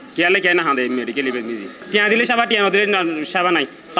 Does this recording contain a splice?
yes; 1 cut; at 1.8 s

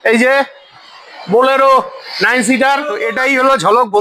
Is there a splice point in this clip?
yes; 1 cut; at 3.0 s

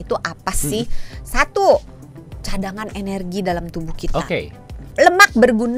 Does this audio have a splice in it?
yes; 1 cut; at 4.9 s

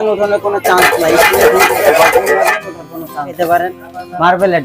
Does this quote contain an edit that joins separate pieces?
yes; 1 cut; at 3.4 s

